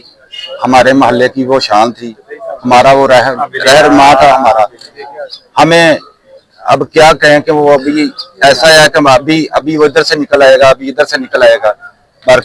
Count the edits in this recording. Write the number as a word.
zero